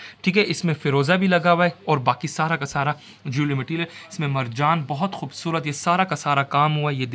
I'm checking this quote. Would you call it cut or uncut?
uncut